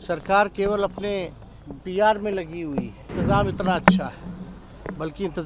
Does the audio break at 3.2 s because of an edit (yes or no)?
yes